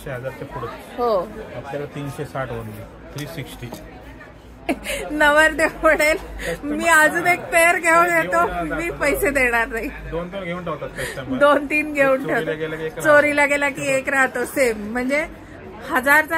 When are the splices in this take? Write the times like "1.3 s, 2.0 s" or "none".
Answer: 4.7 s